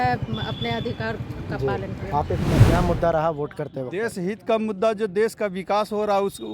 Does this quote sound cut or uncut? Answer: cut